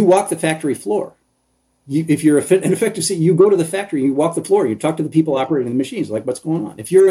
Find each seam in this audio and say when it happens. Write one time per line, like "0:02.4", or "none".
none

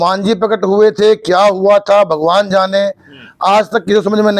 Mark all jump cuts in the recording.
none

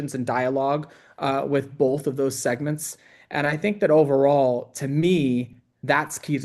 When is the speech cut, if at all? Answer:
none

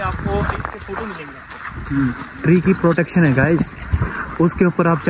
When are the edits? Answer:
none

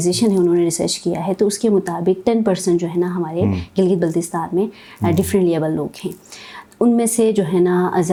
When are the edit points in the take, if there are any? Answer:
none

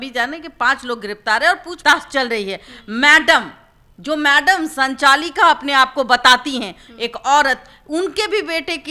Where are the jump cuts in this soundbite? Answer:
none

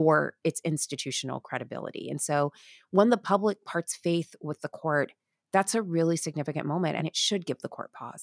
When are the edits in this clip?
0:07.0

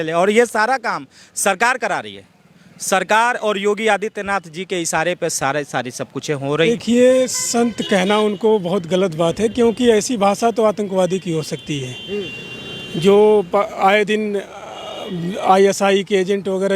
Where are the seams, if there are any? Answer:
0:06.7

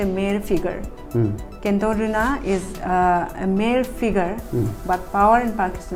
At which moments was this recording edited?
none

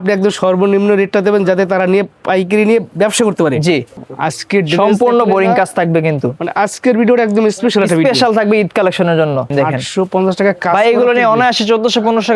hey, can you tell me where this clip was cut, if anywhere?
0:03.9
0:09.5

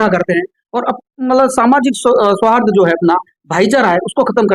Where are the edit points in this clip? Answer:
none

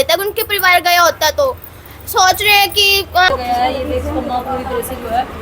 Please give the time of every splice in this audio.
0:03.3

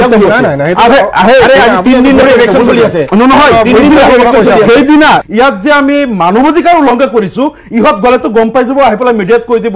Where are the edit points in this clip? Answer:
0:05.2

